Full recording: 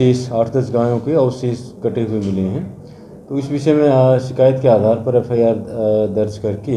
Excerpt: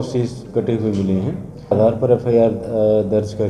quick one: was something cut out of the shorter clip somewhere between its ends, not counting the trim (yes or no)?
yes